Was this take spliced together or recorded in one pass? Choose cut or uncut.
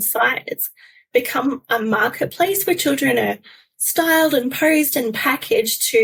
uncut